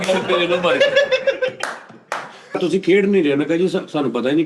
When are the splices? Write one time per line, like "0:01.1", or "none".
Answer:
0:02.6